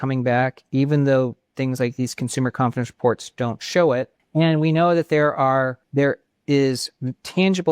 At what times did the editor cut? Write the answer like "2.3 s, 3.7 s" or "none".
4.2 s, 5.8 s